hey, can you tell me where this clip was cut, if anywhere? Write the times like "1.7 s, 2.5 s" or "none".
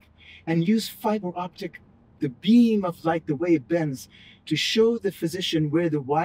none